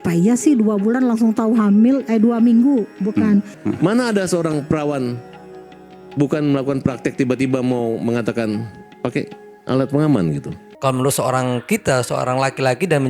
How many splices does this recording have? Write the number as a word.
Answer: two